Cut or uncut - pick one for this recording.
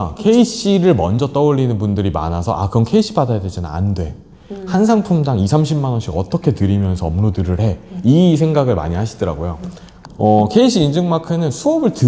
uncut